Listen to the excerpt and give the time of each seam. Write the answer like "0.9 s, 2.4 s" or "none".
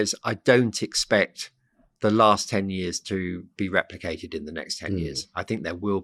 none

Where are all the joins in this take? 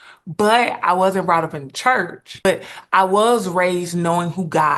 2.4 s

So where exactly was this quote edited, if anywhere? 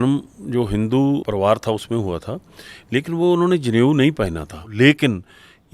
1.2 s, 4.6 s

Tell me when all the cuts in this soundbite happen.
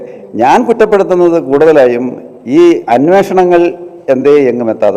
none

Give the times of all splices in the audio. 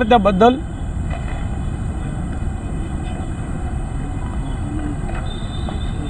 none

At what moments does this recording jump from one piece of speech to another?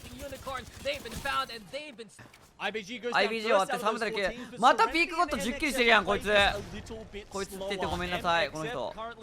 2.3 s

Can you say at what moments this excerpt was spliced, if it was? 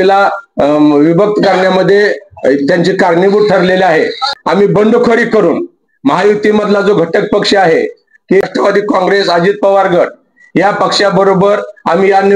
4.3 s, 8.4 s

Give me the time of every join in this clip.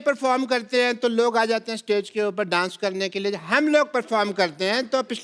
none

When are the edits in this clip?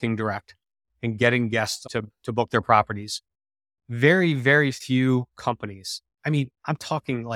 1.8 s

